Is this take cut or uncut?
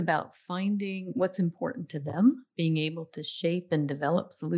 cut